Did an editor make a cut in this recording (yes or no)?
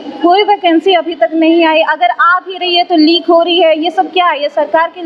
no